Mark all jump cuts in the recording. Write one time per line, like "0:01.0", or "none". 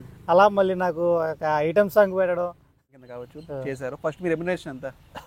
0:02.7